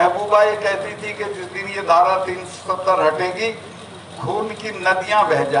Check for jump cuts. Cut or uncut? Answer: uncut